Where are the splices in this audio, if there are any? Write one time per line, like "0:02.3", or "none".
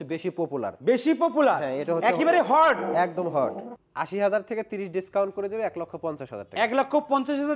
0:03.7